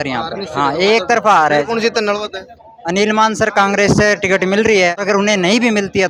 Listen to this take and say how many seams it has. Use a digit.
0